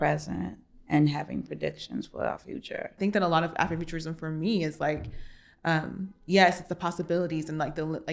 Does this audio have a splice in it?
yes; 1 cut; at 3.0 s

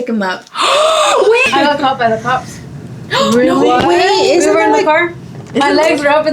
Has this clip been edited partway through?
yes; 1 cut; at 1.5 s

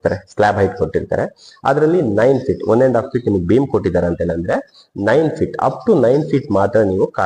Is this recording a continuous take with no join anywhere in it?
yes; 0 cuts

